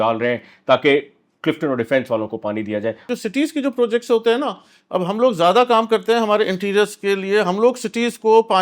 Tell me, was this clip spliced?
yes; 1 cut; at 3.0 s

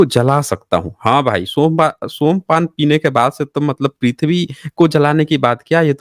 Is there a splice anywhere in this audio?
no; 0 cuts

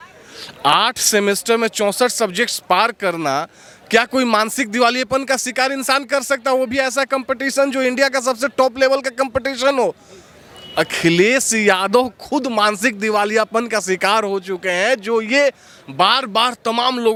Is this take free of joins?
yes; 0 cuts

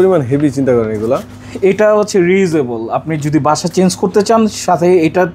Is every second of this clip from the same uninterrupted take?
yes; 0 cuts

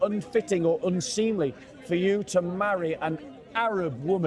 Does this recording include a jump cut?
no; 0 cuts

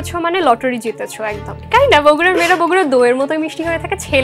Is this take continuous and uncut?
no; 1 cut; at 1.6 s

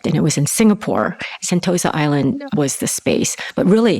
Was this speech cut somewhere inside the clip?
yes; 2 cuts; at 1.3 s, 2.4 s

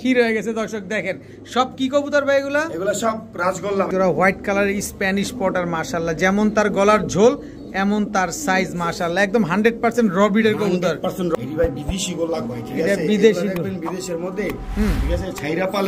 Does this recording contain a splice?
yes; 2 cuts; at 3.9 s, 11.3 s

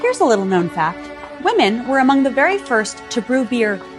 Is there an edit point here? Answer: yes; 1 cut; at 1.1 s

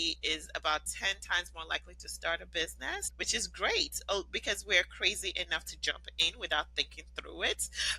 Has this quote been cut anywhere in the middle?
yes; 1 cut; at 3.1 s

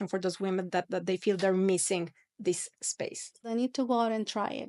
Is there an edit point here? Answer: yes; 1 cut; at 3.5 s

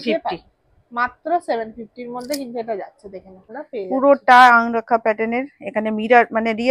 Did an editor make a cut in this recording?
yes; 1 cut; at 3.5 s

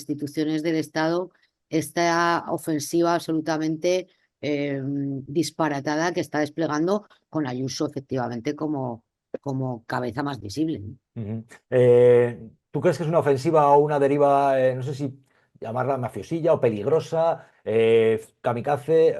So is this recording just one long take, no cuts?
yes; 0 cuts

